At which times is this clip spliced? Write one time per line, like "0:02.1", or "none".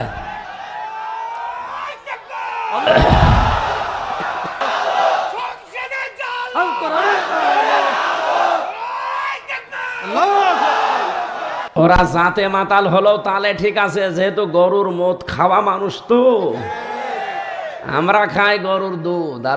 0:04.6
0:11.6